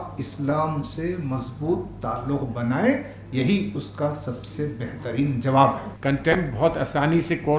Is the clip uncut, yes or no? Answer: no